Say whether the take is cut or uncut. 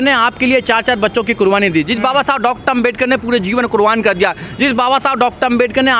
uncut